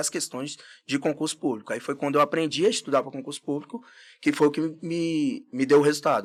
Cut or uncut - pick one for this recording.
uncut